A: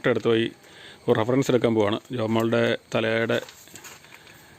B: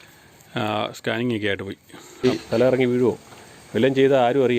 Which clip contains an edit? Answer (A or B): B